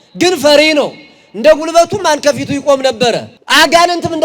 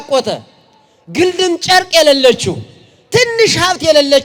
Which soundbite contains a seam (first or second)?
first